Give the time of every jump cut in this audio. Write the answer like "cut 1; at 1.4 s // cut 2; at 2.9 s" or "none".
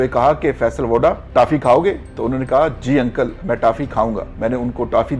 cut 1; at 1.2 s // cut 2; at 4.3 s